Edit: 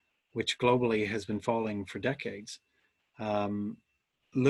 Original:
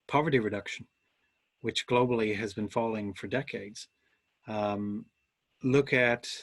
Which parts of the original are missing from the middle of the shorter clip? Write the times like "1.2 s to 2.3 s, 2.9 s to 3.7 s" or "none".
none